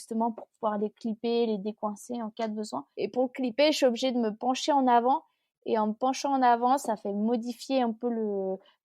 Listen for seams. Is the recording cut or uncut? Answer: cut